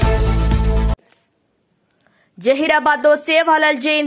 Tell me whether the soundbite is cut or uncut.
cut